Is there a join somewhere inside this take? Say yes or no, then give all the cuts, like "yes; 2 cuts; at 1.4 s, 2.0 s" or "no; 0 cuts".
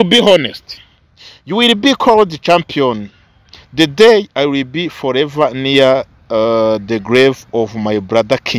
no; 0 cuts